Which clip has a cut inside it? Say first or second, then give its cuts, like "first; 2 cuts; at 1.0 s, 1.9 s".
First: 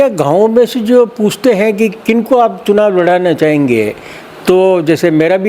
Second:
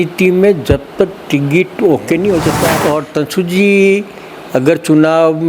second; 1 cut; at 2.8 s